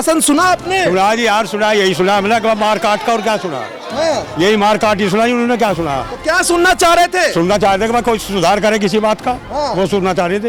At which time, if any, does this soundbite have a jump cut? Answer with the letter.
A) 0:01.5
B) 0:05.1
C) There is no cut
C